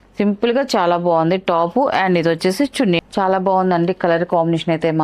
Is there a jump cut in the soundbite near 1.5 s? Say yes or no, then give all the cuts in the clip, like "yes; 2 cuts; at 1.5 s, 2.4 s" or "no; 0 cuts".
no; 1 cut; at 3.0 s